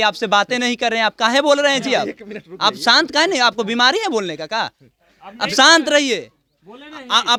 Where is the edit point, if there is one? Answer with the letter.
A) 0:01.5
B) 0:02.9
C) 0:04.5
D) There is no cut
D